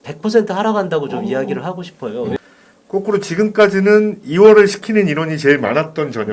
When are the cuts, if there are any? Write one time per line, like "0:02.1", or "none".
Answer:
0:02.4